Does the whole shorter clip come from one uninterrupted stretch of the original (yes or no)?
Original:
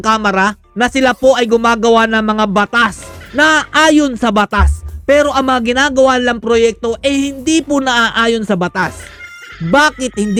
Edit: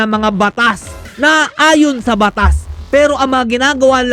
yes